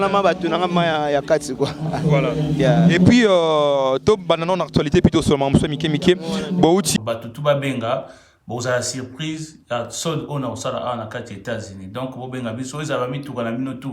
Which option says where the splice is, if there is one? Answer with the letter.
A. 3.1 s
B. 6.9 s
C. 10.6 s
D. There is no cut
B